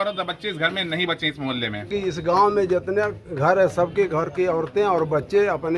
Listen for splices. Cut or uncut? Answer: cut